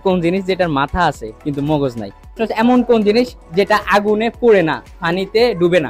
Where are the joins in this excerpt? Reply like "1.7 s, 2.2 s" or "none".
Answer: 2.3 s